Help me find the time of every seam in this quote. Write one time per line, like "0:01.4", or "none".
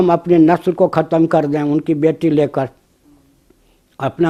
none